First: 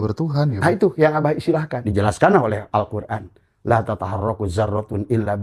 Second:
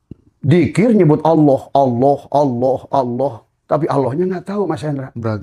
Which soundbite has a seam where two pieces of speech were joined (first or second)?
first